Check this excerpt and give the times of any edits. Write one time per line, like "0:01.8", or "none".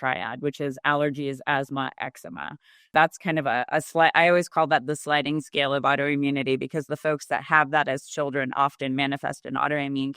0:02.9